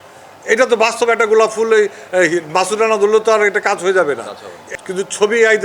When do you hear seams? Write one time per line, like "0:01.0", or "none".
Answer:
0:04.6